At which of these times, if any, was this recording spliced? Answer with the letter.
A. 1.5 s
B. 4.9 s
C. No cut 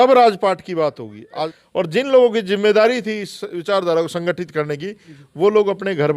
A